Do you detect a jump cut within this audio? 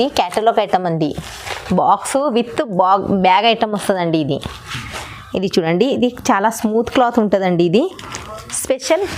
no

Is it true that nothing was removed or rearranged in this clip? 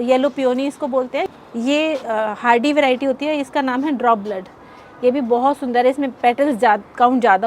no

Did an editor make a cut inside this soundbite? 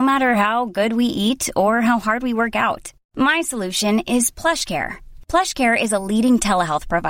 no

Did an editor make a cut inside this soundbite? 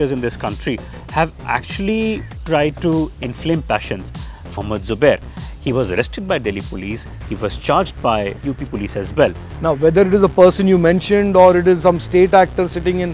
yes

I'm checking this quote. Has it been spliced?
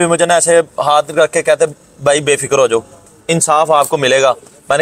no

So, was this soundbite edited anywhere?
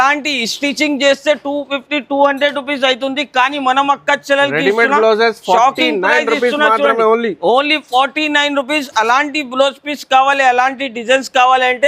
no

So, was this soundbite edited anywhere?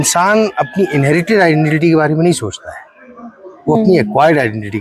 no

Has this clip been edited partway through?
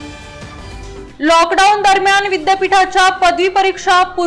yes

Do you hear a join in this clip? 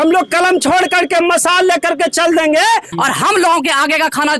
yes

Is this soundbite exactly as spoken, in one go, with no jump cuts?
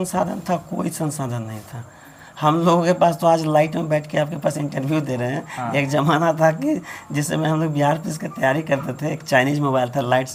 yes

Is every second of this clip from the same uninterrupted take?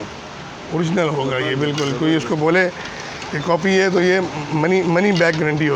yes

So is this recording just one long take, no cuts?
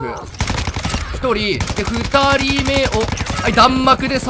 yes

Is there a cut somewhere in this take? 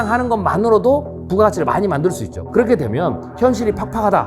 yes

